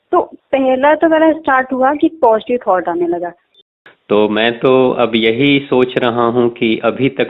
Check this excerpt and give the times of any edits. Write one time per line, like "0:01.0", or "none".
0:03.5